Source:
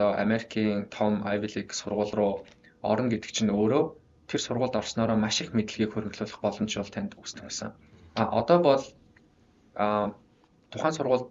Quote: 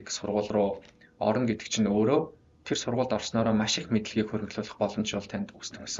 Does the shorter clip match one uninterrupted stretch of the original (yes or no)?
yes